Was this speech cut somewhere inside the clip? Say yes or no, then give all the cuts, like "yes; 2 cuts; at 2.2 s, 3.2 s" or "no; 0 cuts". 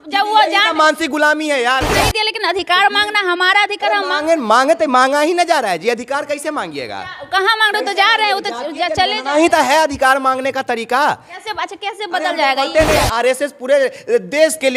yes; 2 cuts; at 1.9 s, 12.9 s